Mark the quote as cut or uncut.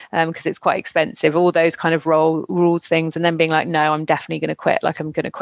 uncut